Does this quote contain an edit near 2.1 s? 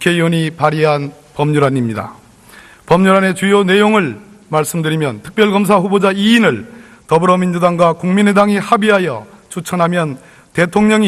yes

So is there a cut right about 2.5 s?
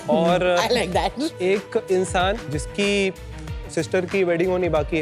yes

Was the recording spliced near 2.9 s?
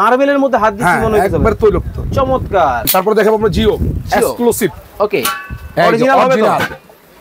yes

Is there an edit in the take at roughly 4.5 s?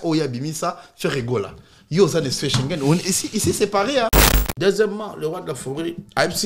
yes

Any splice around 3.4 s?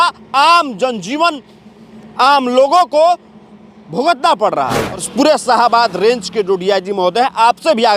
no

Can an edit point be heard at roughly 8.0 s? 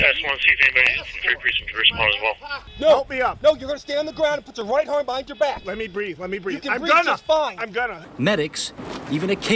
yes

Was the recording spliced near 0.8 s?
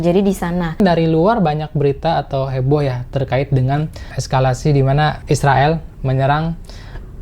yes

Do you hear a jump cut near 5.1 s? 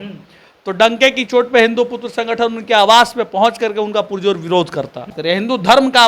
yes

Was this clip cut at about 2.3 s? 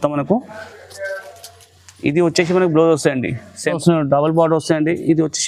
no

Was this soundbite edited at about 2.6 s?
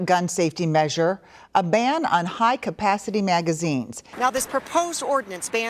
no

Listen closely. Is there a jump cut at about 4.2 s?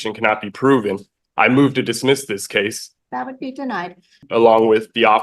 yes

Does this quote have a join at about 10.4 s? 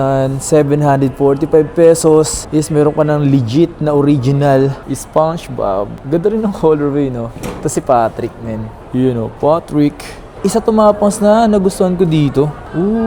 yes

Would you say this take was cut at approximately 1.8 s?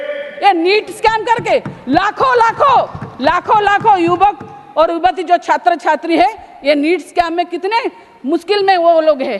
no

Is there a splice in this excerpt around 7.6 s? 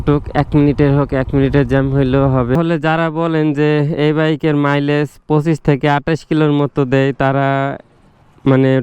no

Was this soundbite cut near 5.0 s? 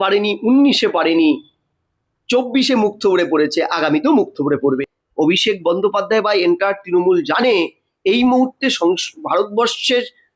yes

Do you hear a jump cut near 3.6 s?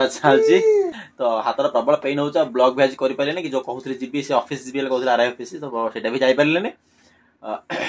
no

